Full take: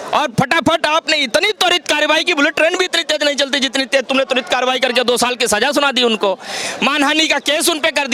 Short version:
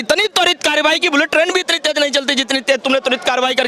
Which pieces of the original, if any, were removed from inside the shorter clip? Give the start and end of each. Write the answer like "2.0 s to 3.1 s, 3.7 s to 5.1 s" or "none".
none